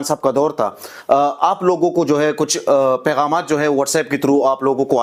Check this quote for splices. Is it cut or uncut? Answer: uncut